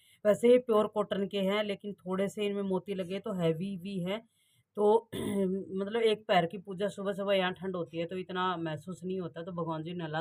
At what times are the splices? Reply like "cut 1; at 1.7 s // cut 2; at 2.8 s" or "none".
none